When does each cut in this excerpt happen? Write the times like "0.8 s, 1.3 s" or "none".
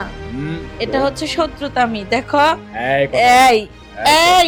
none

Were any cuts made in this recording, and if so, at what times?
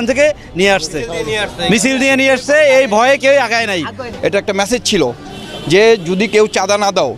4.1 s

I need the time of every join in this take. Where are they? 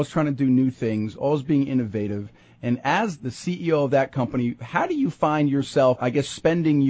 3.3 s, 6.0 s

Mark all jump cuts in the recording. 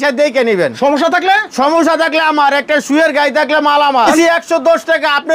4.1 s

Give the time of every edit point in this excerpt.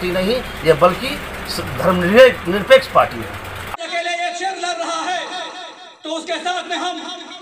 3.6 s

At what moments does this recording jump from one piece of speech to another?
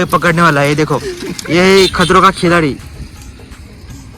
2.9 s

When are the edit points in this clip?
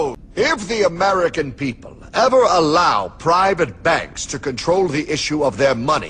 1.0 s

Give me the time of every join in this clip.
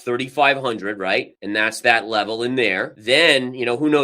1.4 s

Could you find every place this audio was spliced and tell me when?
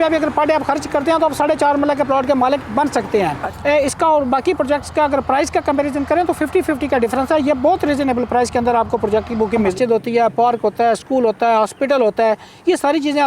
3.4 s, 9.7 s

